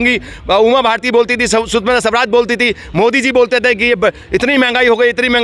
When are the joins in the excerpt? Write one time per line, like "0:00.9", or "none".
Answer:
none